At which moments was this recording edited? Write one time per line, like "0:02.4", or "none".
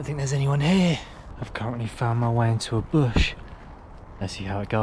0:01.4